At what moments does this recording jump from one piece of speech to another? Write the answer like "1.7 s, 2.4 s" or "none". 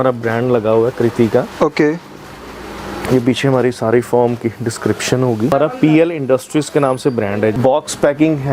5.5 s, 7.6 s